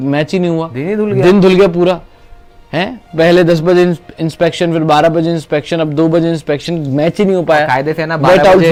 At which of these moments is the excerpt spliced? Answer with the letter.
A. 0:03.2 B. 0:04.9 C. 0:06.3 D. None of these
D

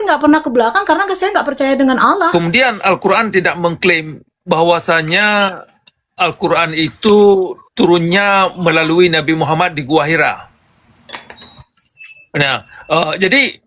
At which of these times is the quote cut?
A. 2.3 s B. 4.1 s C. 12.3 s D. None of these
A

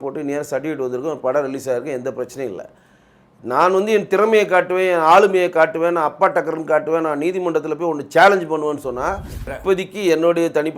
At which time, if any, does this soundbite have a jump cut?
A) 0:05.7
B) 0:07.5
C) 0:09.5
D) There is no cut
C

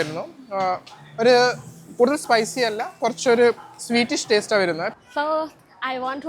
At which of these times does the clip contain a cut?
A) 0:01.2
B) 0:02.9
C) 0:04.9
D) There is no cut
C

